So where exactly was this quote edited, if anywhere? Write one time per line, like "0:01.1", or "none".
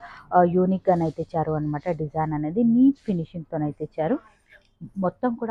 none